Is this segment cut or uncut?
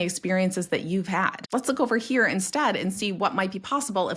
cut